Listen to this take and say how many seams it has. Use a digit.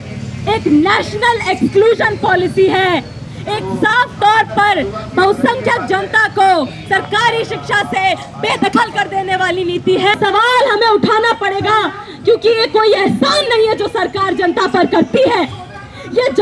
1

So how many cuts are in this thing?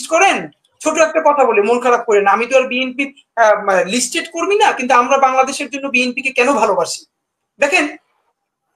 0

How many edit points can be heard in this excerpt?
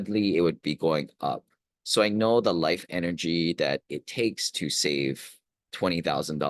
0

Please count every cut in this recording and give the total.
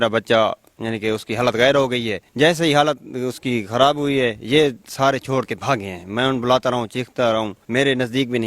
2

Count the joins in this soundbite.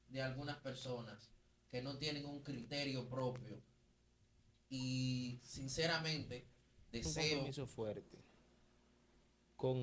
1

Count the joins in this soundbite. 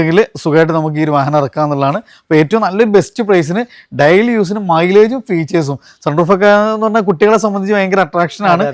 0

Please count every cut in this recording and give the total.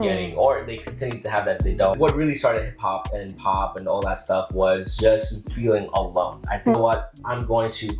2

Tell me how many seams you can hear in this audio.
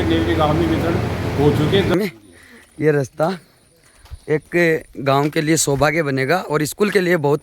1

